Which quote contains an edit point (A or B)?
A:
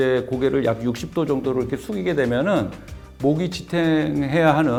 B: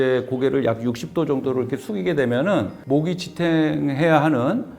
B